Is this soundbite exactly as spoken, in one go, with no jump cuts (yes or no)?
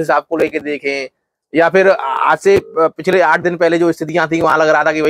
yes